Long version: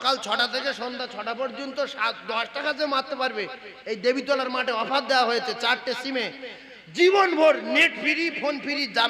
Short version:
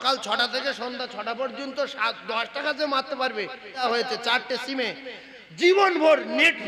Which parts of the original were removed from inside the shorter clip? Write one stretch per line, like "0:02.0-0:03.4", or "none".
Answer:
0:03.8-0:05.2